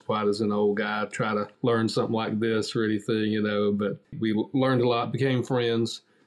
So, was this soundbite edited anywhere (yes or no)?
yes